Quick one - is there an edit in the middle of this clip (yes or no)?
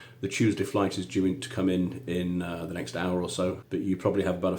yes